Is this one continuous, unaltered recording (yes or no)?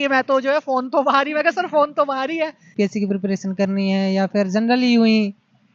no